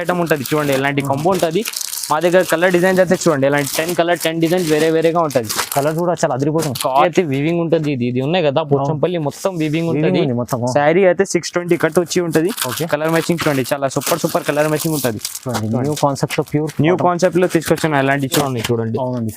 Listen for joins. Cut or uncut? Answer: cut